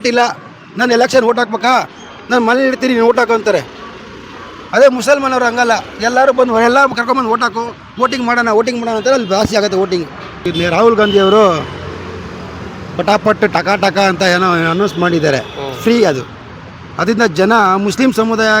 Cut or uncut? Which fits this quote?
cut